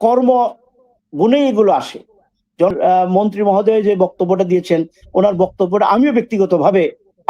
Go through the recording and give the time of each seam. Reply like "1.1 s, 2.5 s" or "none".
2.7 s